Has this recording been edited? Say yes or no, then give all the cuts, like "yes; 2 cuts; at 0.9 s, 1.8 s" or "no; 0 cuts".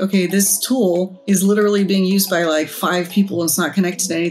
yes; 1 cut; at 1.2 s